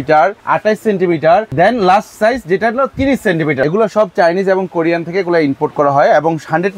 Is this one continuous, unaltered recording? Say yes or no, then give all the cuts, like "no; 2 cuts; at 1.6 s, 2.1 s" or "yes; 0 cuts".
no; 2 cuts; at 1.5 s, 3.6 s